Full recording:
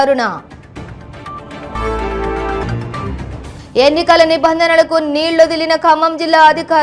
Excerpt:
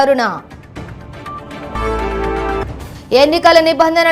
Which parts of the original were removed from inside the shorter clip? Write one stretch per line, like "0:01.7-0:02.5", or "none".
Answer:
0:02.7-0:03.3